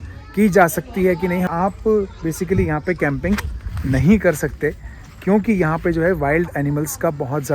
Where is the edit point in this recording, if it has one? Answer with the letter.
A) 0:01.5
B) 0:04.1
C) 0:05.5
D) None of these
A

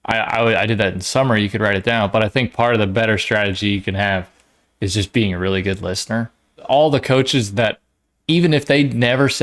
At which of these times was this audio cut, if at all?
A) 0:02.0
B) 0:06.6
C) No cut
B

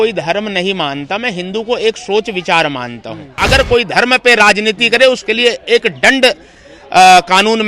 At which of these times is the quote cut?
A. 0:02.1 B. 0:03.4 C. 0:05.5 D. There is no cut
B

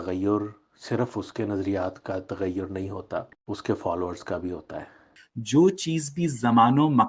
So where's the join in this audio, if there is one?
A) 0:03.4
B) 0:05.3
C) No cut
B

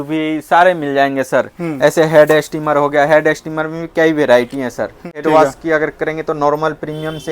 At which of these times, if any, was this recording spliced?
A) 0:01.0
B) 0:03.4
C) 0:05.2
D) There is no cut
C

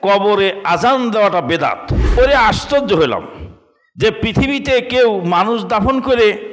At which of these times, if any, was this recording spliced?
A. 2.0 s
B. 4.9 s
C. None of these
A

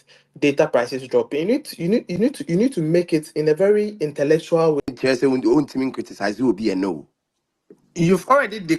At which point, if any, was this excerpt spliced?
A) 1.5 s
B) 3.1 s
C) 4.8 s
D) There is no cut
C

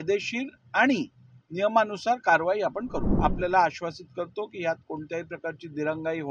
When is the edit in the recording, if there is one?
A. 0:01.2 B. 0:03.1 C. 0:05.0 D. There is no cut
B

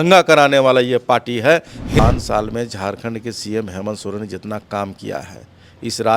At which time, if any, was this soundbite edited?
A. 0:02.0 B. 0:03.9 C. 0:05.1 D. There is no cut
A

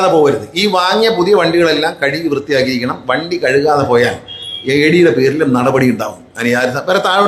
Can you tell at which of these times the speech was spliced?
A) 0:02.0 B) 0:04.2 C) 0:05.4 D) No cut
D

